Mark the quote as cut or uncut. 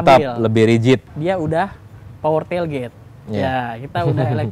cut